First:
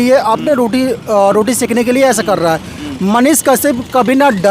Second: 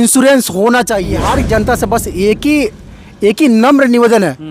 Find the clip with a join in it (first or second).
second